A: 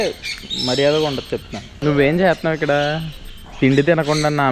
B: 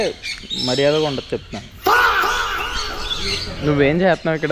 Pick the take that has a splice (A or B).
A